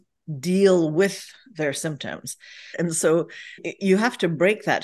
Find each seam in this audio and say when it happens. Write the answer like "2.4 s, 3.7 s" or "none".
2.7 s, 3.7 s